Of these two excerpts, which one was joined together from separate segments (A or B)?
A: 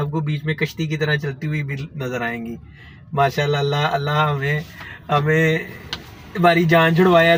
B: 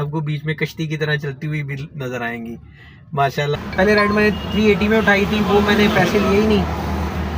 B